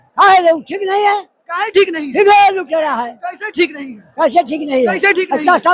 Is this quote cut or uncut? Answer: uncut